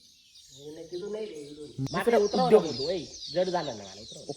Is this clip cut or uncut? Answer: cut